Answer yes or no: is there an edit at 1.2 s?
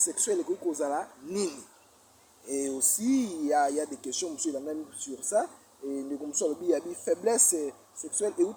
no